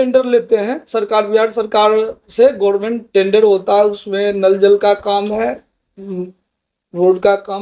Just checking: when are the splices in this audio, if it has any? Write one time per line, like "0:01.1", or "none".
none